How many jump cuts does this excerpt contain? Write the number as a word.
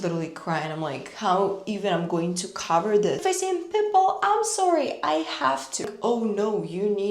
two